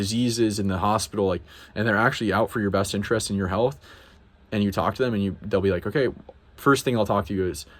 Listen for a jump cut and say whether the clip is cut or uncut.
uncut